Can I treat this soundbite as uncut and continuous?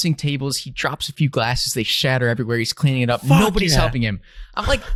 yes; 0 cuts

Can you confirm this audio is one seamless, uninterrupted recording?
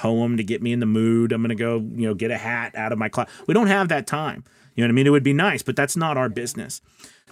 no; 1 cut; at 5.9 s

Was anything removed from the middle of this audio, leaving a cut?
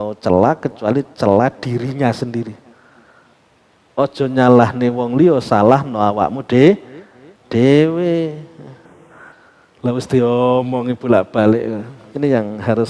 no; 0 cuts

